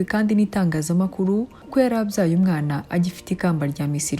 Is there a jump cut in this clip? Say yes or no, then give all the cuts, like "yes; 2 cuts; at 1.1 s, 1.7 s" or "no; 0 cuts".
yes; 1 cut; at 1.6 s